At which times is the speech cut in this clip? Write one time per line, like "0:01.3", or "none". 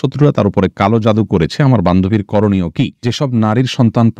0:03.1